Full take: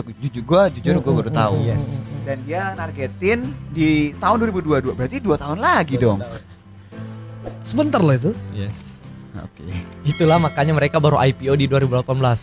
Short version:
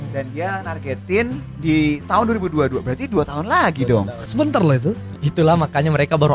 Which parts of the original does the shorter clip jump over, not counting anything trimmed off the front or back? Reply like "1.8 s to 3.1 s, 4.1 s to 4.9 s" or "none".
6.3 s to 7.6 s, 8.5 s to 9.9 s